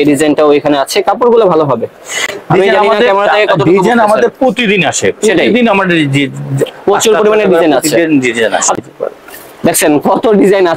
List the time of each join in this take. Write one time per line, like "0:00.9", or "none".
none

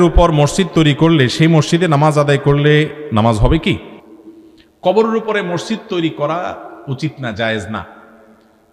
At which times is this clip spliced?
none

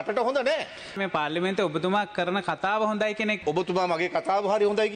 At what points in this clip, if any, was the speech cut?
0:01.0
0:03.4

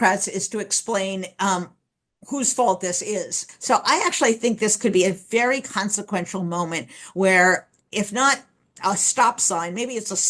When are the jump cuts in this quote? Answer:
0:03.4

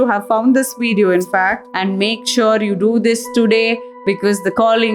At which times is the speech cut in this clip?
0:01.7

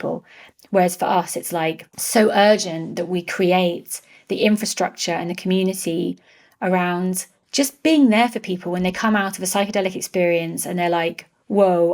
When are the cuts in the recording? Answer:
0:01.9
0:07.3

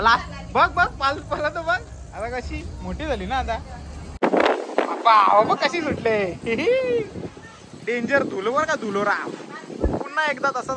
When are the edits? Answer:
0:04.2

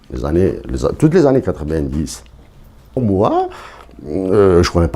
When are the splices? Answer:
0:03.0

